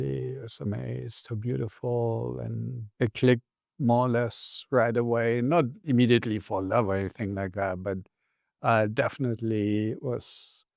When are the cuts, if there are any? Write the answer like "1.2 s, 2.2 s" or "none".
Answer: 2.8 s